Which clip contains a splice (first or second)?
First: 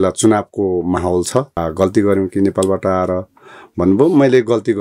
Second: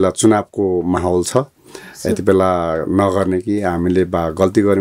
first